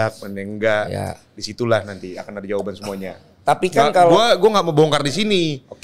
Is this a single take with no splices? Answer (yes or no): yes